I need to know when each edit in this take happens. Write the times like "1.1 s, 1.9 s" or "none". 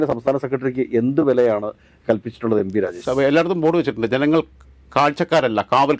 3.0 s